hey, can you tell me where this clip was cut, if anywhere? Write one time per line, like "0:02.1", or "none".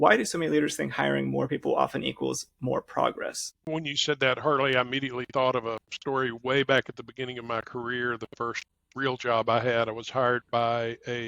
0:03.5